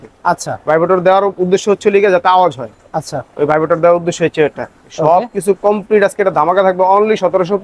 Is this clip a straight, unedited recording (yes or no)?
yes